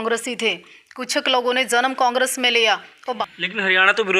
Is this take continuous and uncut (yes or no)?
no